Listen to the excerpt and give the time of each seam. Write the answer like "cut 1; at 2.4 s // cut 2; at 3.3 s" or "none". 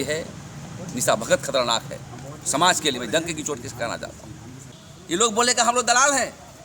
cut 1; at 5.2 s